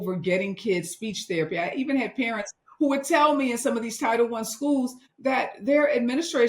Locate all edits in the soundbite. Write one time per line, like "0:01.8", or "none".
0:05.0